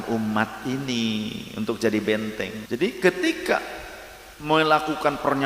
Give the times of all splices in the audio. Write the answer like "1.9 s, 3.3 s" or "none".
2.6 s